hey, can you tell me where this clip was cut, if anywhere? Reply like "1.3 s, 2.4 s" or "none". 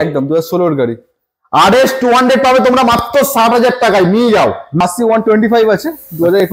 4.8 s